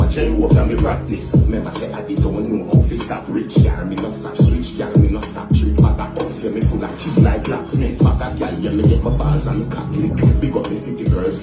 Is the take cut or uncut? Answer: uncut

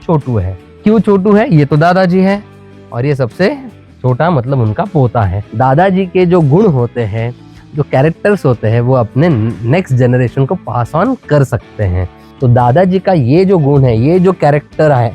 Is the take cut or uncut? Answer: cut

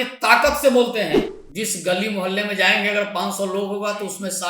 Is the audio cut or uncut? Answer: cut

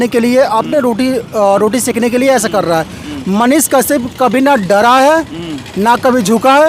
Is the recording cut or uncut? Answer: uncut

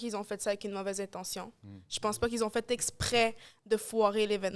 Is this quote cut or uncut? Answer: uncut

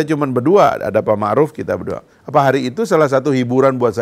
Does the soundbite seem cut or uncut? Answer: cut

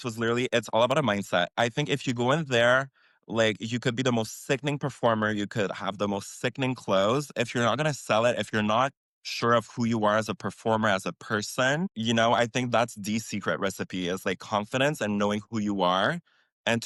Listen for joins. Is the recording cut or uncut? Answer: uncut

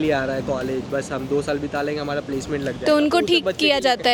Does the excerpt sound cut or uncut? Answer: uncut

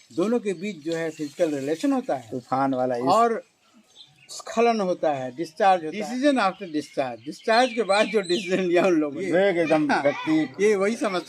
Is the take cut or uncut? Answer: cut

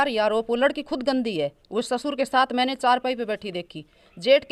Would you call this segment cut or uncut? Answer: uncut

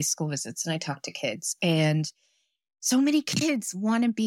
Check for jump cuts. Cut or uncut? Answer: uncut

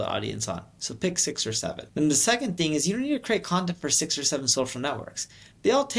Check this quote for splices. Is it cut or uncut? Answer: cut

